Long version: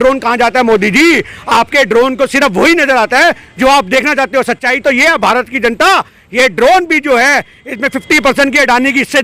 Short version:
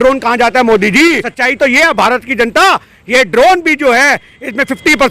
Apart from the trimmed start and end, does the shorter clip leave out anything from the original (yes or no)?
yes